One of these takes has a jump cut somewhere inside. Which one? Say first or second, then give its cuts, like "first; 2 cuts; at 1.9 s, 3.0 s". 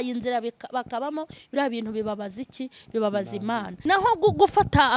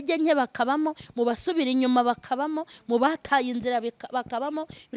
first; 1 cut; at 3.7 s